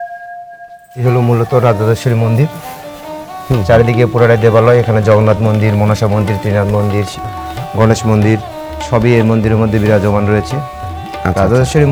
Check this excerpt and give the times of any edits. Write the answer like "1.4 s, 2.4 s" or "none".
none